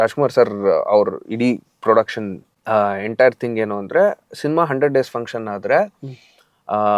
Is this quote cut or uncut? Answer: uncut